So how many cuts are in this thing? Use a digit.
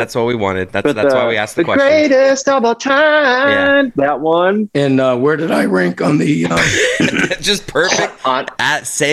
1